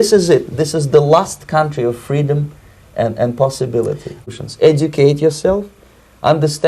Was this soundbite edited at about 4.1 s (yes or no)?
yes